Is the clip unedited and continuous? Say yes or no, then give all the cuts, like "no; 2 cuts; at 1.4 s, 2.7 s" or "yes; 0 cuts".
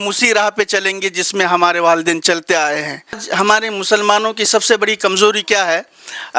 no; 1 cut; at 3.2 s